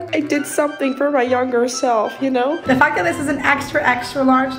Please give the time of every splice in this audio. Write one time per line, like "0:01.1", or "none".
0:02.6